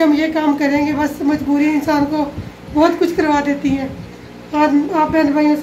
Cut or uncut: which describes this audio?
uncut